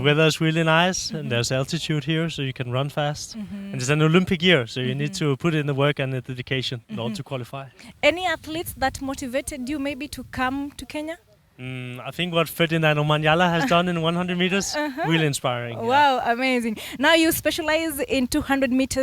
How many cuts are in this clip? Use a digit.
0